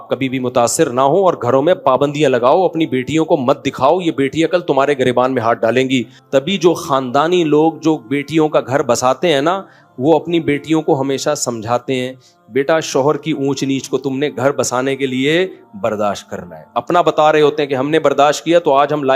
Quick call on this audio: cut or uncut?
cut